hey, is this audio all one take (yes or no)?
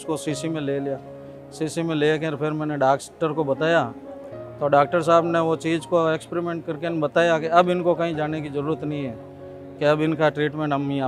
yes